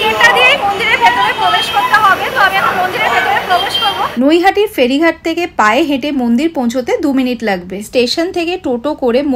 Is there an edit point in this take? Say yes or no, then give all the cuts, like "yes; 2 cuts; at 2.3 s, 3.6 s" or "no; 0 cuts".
yes; 2 cuts; at 4.0 s, 7.9 s